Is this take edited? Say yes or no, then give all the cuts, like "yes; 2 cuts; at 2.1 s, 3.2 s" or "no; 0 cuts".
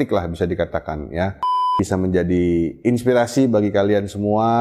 yes; 1 cut; at 1.6 s